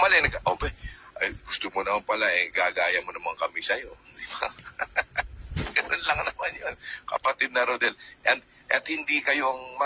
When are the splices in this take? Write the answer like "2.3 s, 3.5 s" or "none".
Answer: 5.5 s

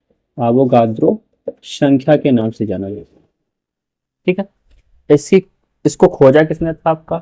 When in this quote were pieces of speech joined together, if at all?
none

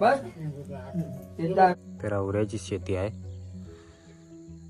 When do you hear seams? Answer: 1.8 s

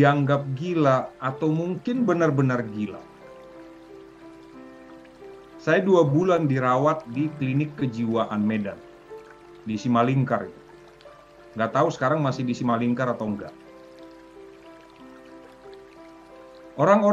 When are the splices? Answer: none

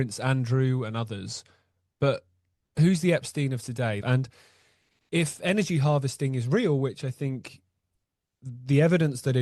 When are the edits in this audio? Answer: 4.0 s

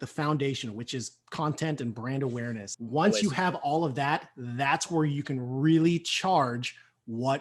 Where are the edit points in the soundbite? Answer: 2.7 s

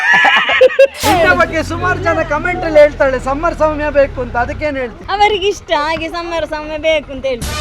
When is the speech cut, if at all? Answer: 1.0 s, 5.0 s

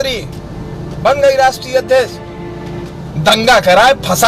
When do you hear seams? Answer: 3.1 s

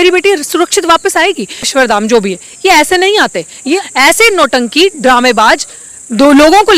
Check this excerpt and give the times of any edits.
1.7 s, 3.9 s

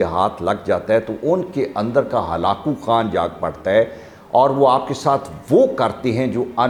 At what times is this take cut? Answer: none

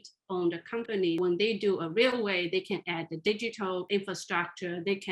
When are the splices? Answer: 1.2 s, 3.9 s

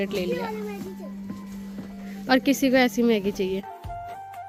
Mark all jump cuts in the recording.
none

